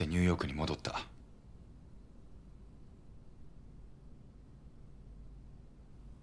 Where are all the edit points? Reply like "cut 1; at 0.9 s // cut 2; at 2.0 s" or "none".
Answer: none